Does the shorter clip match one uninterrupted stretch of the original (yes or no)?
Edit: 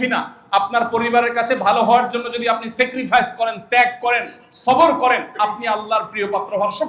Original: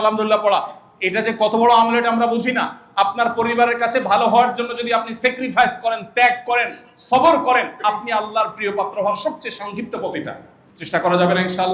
yes